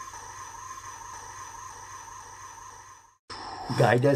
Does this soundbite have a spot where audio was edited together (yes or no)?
yes